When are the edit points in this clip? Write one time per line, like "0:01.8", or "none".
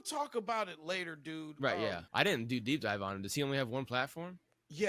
0:02.0